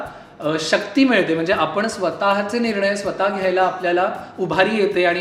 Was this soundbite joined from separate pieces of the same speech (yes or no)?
no